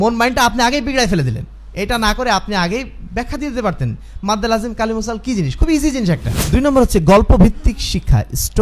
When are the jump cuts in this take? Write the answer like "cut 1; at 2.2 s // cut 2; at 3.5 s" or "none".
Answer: cut 1; at 6.3 s